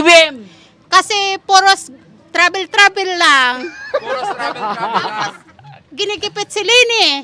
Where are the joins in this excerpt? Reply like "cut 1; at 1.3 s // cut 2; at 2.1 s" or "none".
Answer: none

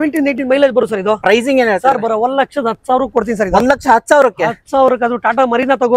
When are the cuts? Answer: none

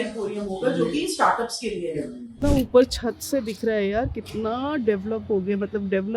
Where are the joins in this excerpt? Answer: cut 1; at 2.4 s

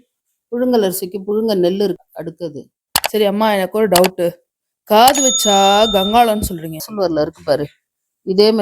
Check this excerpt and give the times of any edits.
cut 1; at 2.0 s // cut 2; at 6.9 s

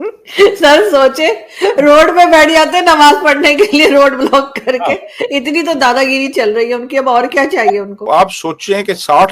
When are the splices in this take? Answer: cut 1; at 8.0 s

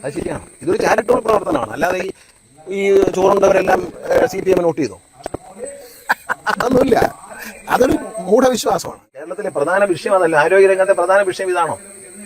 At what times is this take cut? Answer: cut 1; at 9.3 s

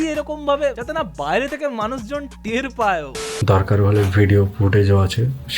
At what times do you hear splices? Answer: cut 1; at 0.8 s // cut 2; at 3.1 s

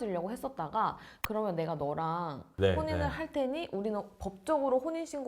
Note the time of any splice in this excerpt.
cut 1; at 1.2 s

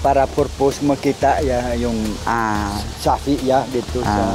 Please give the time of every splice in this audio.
none

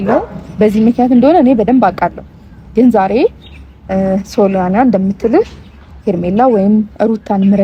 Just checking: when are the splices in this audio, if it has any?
none

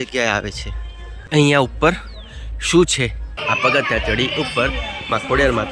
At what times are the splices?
cut 1; at 1.2 s // cut 2; at 3.3 s

